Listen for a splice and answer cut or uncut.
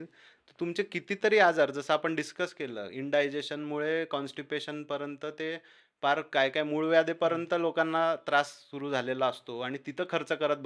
uncut